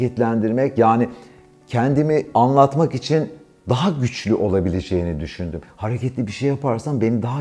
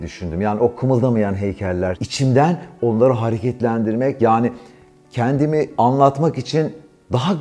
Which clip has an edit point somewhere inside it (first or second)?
second